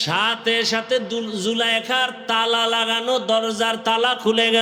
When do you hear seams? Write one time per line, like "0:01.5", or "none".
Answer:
none

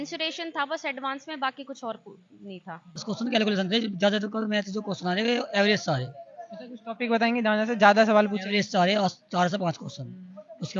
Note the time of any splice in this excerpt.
0:03.0

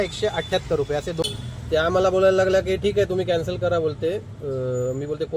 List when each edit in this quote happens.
0:01.2

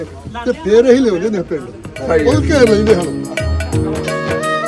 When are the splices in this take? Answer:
0:03.1

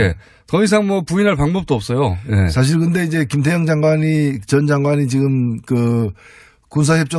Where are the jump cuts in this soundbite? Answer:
none

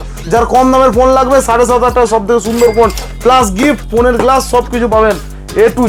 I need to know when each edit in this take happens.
none

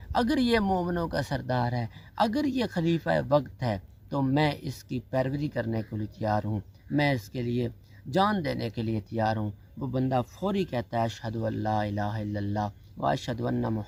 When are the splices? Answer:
none

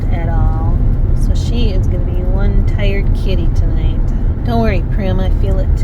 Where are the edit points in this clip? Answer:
0:01.0
0:04.3

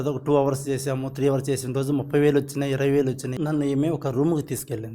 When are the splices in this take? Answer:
0:03.3

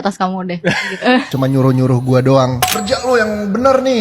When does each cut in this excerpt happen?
0:01.3

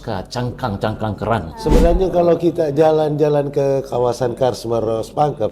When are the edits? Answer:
0:01.5

